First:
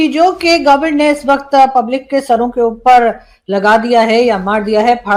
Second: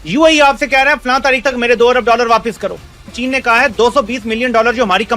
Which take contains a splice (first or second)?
second